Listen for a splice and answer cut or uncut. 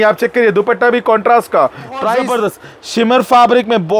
cut